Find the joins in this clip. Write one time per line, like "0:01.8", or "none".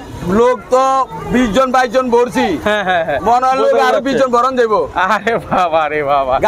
none